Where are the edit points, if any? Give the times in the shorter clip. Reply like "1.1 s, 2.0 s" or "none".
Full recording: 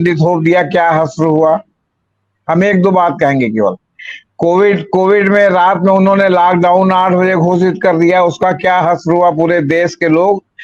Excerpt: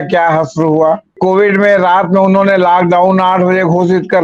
1.1 s